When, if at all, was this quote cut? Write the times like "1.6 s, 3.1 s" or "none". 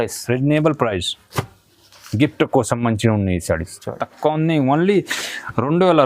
4.1 s

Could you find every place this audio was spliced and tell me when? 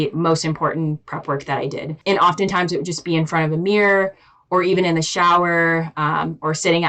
1.9 s

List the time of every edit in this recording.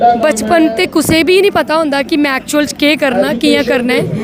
none

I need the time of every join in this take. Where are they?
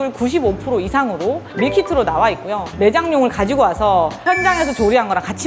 2.7 s

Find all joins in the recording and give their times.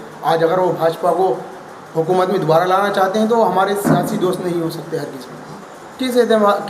5.5 s

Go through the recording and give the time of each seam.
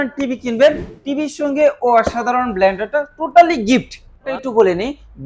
4.3 s

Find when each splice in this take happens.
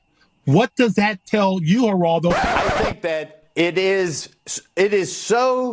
2.5 s

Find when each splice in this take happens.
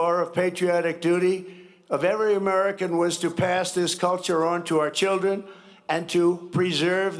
none

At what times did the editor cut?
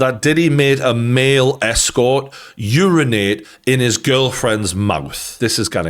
none

